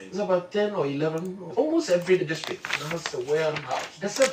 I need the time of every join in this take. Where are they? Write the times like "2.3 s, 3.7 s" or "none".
1.5 s, 2.2 s